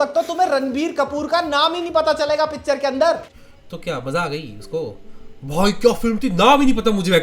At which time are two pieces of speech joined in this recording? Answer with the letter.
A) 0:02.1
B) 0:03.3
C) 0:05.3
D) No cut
B